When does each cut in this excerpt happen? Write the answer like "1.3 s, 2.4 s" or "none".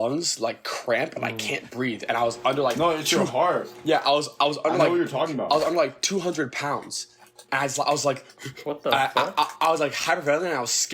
none